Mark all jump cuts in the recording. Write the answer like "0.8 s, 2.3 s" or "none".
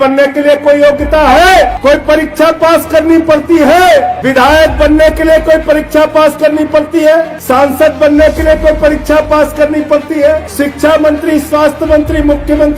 1.7 s, 4.2 s, 7.4 s, 10.5 s